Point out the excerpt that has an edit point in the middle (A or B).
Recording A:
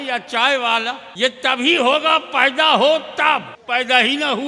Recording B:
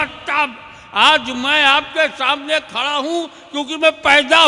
A